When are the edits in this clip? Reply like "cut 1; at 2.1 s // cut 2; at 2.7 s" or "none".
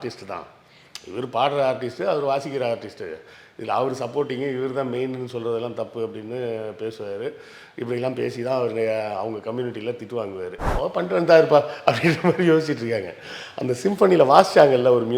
cut 1; at 10.7 s